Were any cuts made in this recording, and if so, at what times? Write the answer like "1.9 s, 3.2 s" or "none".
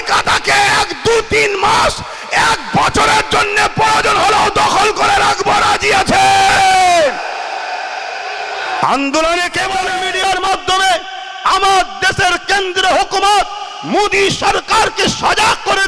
9.9 s